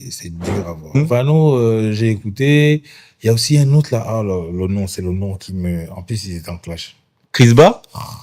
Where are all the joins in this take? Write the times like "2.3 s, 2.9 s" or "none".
0.9 s